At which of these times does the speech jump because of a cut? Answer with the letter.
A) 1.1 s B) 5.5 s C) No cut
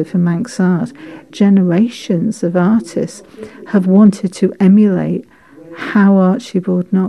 A